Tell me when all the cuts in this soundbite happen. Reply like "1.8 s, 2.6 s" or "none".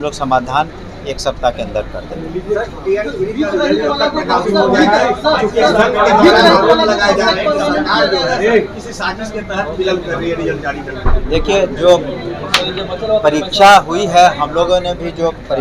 none

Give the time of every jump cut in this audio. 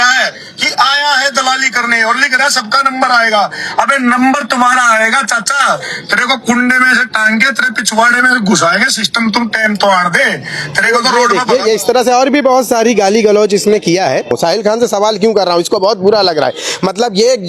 14.3 s

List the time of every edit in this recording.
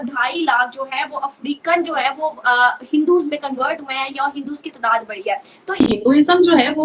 5.7 s

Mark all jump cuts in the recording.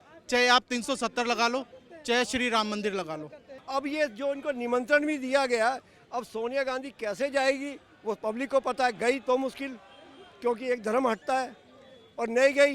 3.6 s

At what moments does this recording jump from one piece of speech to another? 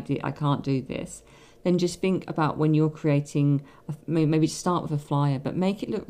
none

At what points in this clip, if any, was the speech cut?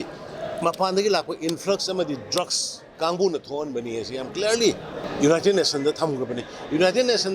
2.9 s, 5.0 s

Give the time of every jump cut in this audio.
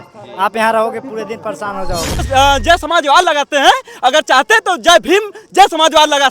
2.3 s

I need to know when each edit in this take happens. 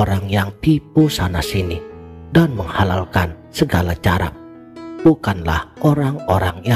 5.0 s

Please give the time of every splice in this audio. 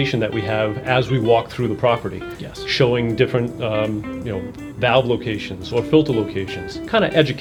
none

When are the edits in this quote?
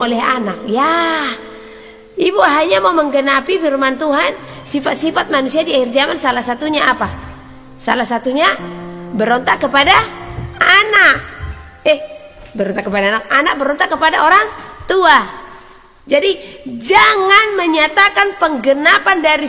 none

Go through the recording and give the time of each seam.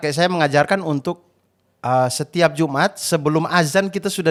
none

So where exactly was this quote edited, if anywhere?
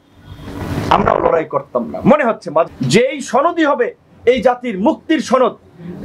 2.7 s

